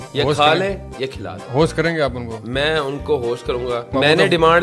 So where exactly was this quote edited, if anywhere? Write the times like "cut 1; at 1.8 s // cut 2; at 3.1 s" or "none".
none